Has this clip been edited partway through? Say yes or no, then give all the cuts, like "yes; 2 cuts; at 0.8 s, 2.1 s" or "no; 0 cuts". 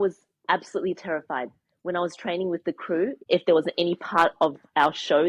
yes; 1 cut; at 3.2 s